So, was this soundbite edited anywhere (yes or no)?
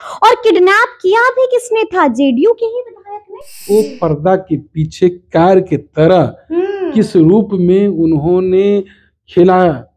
yes